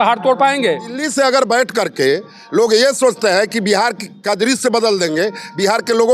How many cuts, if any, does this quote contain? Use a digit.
1